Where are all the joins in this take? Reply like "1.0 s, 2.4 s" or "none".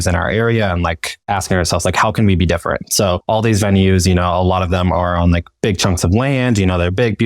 1.1 s